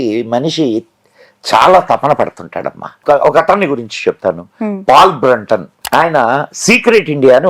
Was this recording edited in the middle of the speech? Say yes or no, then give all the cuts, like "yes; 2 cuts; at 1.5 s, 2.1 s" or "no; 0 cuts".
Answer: yes; 2 cuts; at 3.0 s, 5.7 s